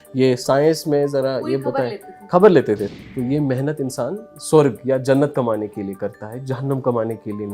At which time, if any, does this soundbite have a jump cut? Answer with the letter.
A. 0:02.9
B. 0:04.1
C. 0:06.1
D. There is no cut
A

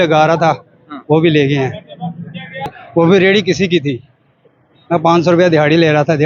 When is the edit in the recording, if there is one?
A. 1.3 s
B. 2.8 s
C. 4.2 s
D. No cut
B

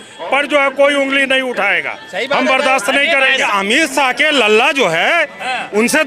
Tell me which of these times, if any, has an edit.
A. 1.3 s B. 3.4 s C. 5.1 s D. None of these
B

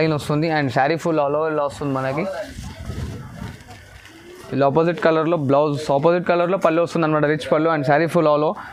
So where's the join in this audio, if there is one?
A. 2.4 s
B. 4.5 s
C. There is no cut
C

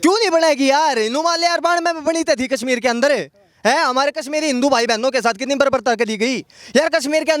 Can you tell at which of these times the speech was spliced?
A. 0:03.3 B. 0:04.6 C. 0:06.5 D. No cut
D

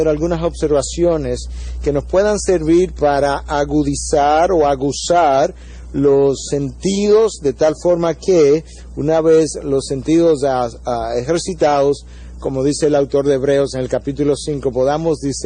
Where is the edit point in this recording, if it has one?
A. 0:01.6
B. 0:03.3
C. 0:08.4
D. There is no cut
C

